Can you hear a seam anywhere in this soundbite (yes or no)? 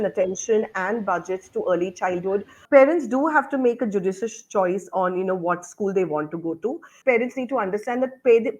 yes